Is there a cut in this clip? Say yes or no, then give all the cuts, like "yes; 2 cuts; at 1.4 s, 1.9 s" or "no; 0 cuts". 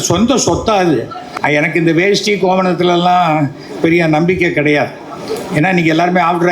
yes; 1 cut; at 1.3 s